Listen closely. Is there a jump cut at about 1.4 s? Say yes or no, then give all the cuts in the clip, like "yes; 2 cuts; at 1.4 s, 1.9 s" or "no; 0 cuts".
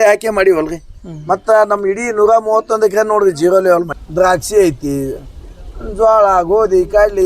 no; 1 cut; at 4.0 s